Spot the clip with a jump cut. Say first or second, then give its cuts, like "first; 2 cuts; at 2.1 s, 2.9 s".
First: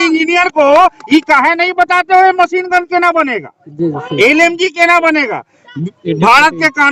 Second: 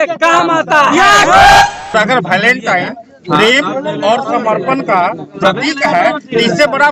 second; 1 cut; at 1.9 s